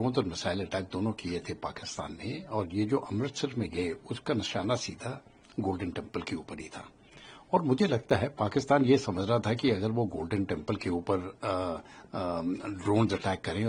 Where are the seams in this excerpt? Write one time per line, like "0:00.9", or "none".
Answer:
none